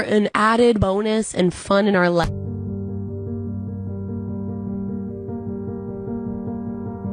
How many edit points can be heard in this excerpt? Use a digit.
0